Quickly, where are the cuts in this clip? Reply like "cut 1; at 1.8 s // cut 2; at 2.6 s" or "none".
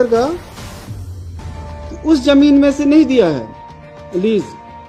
none